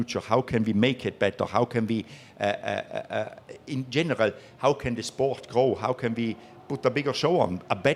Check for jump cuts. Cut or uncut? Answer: uncut